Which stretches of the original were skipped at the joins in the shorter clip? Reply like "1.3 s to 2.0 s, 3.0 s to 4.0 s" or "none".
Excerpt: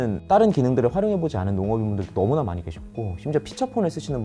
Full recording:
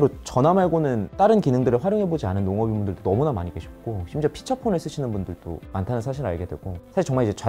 none